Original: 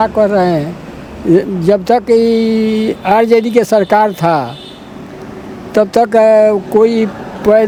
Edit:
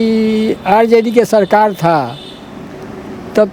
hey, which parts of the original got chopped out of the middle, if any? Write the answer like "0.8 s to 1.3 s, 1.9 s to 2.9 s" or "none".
none